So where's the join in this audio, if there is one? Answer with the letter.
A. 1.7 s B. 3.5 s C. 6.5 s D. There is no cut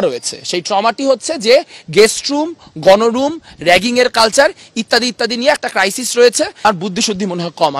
C